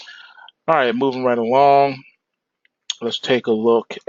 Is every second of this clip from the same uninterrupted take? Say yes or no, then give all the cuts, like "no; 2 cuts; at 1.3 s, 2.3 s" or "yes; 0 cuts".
yes; 0 cuts